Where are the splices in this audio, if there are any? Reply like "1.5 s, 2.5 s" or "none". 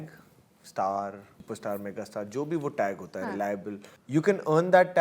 1.3 s, 3.9 s